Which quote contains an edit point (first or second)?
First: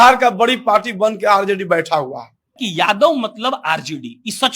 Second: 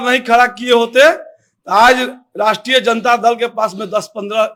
first